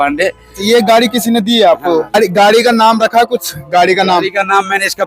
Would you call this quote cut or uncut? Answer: cut